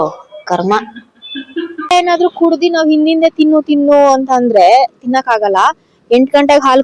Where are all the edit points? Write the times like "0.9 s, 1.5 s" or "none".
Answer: 1.9 s